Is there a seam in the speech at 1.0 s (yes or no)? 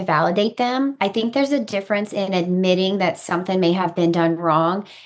yes